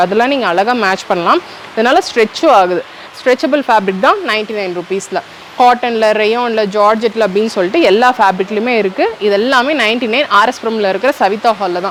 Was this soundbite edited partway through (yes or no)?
no